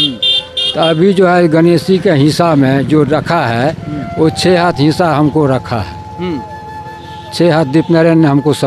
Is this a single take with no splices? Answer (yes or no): yes